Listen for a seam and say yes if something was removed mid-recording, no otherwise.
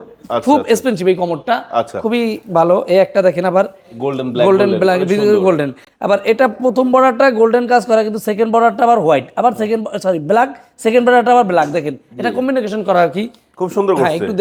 no